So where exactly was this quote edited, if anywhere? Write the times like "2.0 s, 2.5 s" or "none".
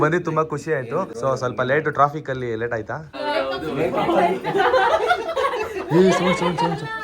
1.1 s, 3.1 s